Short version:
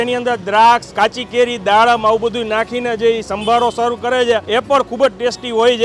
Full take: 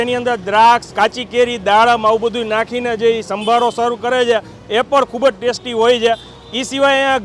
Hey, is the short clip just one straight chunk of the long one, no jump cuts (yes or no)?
no